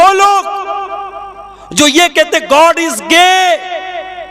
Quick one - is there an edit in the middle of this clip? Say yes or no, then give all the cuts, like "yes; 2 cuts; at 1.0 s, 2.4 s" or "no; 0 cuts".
no; 0 cuts